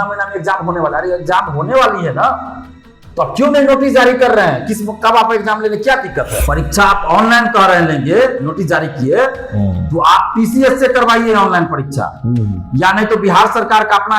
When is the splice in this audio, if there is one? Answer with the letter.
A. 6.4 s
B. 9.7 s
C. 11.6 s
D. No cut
A